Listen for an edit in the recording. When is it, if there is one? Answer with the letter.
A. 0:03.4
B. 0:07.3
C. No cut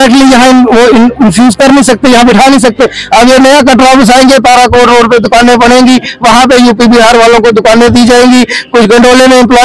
C